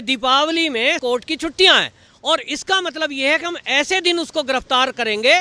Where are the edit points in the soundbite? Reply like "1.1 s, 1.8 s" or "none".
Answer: 1.0 s